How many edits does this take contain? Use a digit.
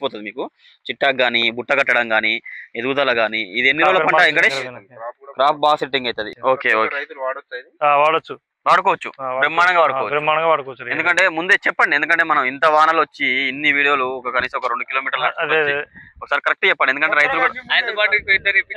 1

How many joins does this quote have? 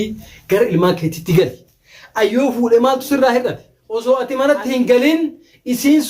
1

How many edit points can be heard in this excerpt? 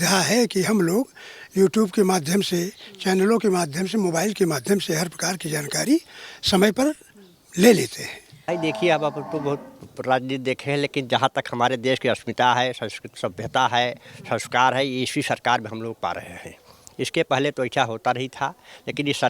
1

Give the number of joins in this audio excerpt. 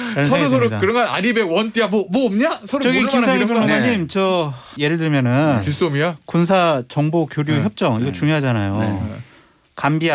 1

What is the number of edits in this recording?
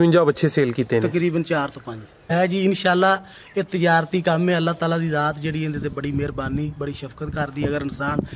1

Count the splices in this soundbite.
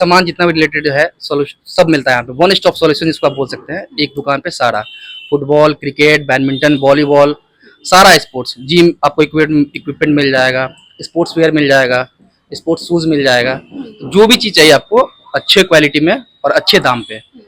0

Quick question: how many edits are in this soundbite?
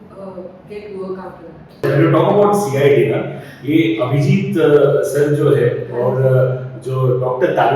1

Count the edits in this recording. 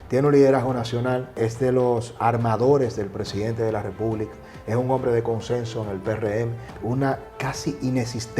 2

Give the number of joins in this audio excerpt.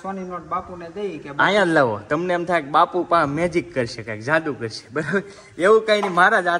0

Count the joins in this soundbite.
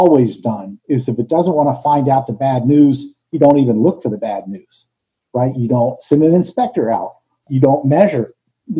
1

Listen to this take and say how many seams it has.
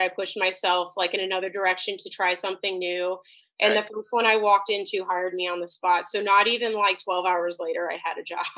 1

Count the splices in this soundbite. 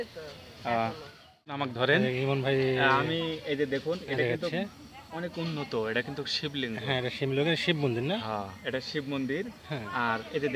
1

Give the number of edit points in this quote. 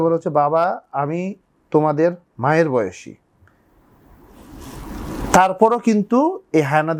0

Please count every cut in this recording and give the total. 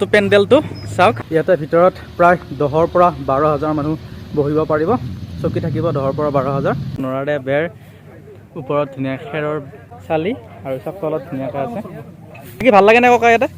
3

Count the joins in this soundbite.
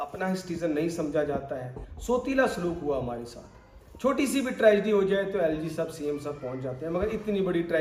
0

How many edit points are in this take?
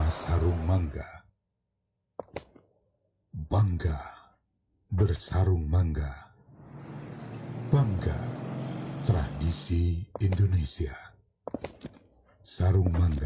1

